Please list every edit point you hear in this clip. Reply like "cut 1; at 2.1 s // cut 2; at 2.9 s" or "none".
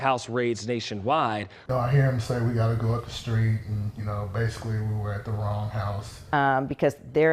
cut 1; at 1.5 s // cut 2; at 6.2 s